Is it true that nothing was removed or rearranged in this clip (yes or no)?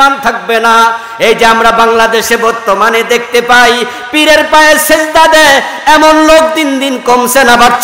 yes